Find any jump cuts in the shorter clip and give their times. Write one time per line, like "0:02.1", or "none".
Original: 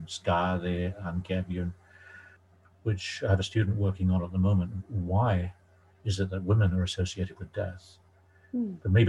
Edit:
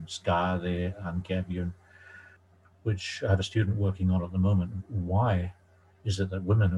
none

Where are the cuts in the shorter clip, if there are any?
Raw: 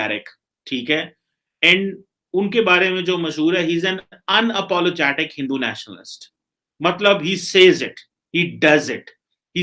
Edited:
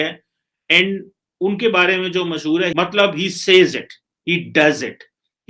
0:02.7

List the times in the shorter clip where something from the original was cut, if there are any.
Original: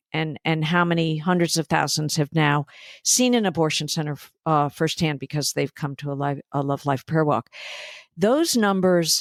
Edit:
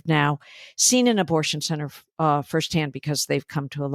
none

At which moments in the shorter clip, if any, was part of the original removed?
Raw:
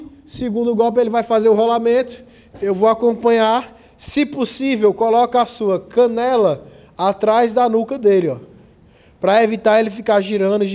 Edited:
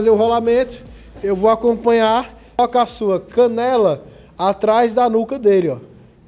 0:02.6

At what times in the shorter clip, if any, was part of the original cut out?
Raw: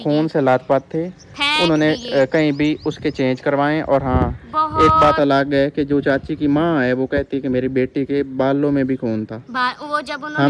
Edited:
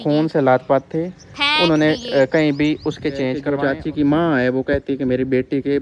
0:03.4

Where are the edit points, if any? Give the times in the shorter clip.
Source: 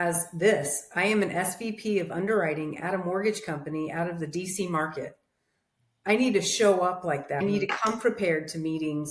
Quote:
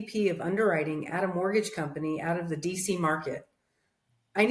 none

